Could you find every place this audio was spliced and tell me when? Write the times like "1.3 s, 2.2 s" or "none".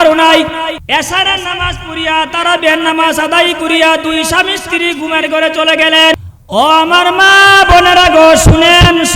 0.8 s, 6.1 s